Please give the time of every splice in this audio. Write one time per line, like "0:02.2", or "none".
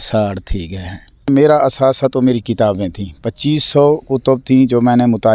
0:01.3